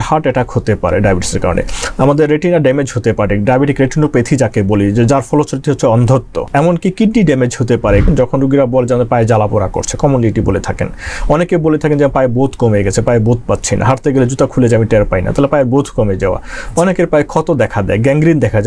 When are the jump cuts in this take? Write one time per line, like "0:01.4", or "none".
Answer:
0:06.4
0:08.1